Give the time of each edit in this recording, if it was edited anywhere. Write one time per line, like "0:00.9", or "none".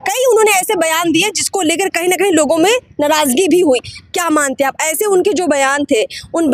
none